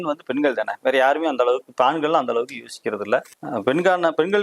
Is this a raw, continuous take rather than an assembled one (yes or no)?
no